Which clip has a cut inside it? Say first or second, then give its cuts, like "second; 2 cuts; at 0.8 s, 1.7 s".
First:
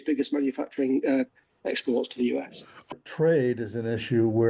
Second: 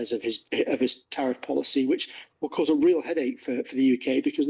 first; 1 cut; at 2.9 s